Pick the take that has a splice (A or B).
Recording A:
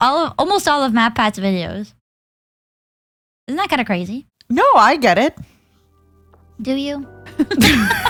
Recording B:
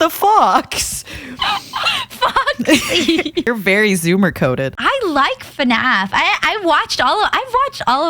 B